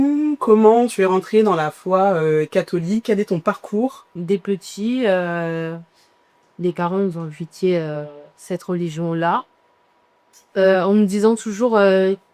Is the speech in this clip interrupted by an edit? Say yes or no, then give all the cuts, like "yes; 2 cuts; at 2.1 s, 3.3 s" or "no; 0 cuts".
yes; 1 cut; at 4.1 s